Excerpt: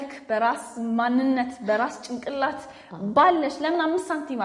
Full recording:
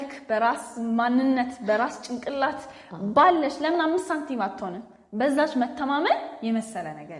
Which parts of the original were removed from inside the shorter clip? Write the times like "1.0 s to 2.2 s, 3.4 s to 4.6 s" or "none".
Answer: none